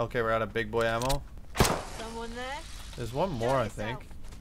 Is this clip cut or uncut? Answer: cut